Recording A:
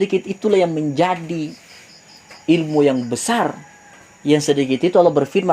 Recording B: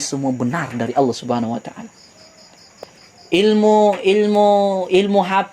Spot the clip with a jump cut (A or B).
B